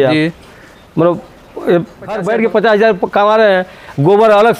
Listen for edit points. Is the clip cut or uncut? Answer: cut